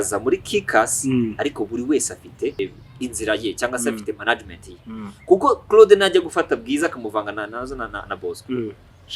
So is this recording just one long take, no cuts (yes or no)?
no